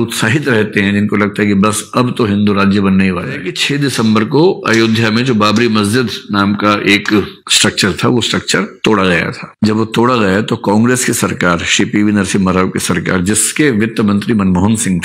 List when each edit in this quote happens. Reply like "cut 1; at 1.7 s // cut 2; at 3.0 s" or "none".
cut 1; at 3.5 s